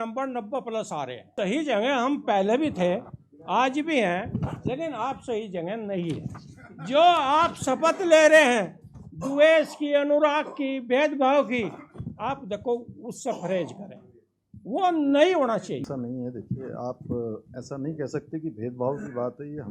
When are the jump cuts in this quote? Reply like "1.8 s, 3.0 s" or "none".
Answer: 1.2 s, 15.8 s